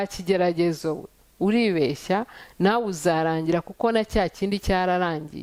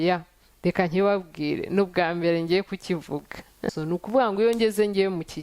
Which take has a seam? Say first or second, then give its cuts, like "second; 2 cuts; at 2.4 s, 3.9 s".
second; 1 cut; at 3.7 s